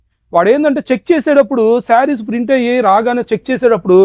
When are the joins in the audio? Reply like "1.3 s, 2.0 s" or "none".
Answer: none